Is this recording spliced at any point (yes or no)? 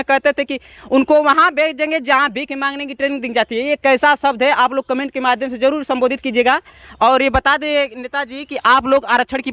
no